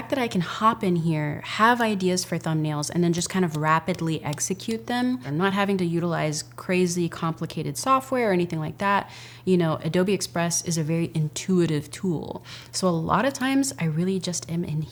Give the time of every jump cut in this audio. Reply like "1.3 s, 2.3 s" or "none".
none